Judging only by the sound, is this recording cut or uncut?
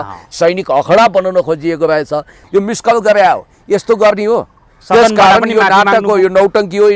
cut